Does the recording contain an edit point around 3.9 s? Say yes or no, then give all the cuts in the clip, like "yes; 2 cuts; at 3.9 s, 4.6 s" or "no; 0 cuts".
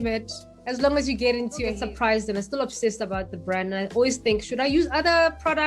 no; 1 cut; at 1.8 s